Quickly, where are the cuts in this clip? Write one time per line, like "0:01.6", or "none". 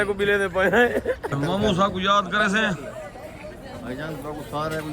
0:01.3